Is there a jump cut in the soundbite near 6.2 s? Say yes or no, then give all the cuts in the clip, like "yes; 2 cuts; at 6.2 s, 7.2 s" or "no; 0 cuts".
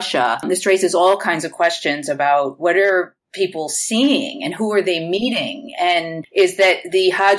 yes; 1 cut; at 6.2 s